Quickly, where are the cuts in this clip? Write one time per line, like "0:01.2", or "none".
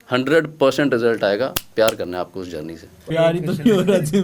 0:03.0